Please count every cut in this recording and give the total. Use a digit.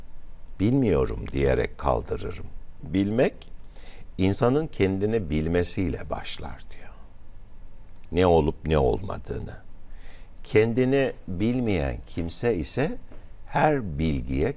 1